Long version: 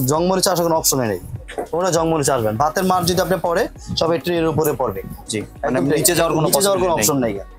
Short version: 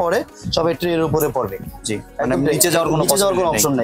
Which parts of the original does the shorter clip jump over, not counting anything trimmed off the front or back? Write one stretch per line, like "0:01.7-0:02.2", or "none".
none